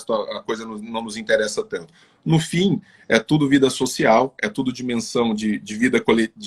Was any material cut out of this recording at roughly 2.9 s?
no; 0 cuts

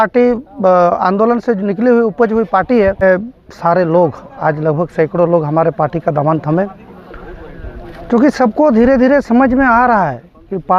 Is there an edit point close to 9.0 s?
no; 1 cut; at 3.0 s

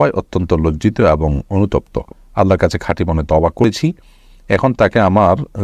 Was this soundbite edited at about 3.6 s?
yes; 1 cut; at 3.6 s

